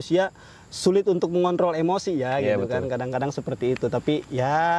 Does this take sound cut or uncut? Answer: uncut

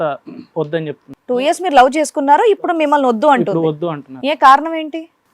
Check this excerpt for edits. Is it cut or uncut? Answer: cut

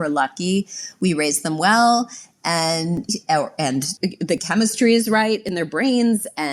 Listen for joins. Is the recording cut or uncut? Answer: cut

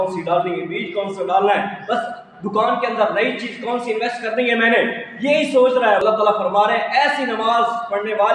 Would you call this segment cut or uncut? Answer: cut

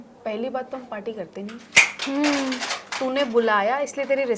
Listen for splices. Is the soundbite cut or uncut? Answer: uncut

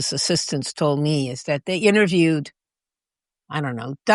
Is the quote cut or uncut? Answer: uncut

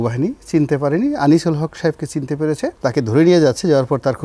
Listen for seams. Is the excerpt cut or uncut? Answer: cut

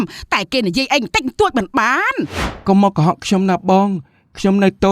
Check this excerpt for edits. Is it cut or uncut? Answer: cut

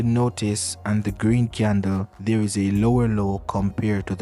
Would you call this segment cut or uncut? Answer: cut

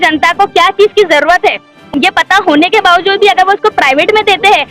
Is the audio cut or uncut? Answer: cut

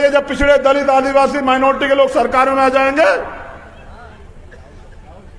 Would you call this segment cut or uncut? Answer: uncut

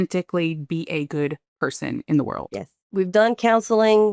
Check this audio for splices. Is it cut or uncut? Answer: cut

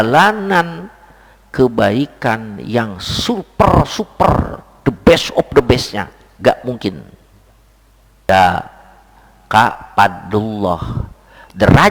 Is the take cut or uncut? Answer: cut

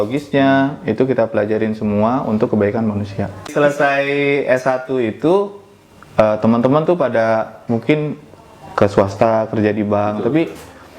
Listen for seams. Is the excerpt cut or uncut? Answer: cut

